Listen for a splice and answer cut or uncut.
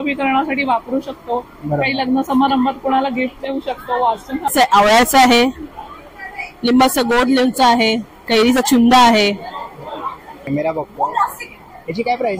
cut